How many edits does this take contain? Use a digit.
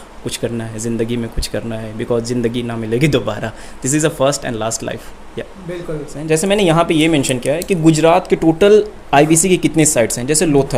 1